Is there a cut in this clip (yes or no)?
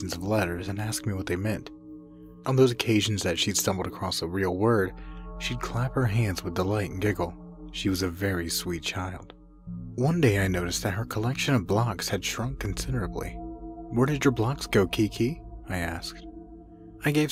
no